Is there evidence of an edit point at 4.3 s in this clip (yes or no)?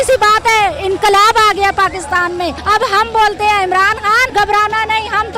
yes